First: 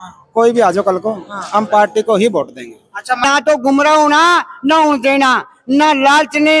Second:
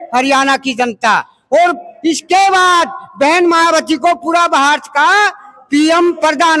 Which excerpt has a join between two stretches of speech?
first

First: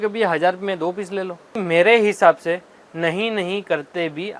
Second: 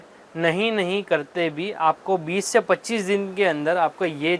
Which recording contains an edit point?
first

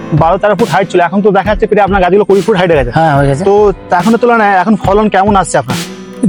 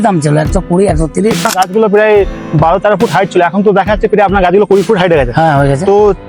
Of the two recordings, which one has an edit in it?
second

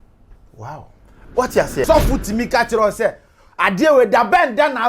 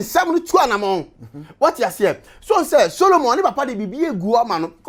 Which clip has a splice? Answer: first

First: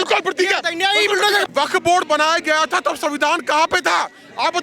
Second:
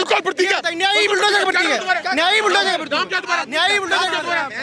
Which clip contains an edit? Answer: first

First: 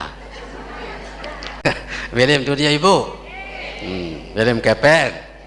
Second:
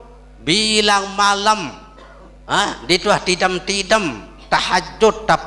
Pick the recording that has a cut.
first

